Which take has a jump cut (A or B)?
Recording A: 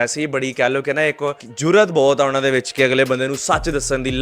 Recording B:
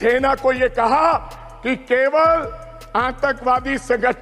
A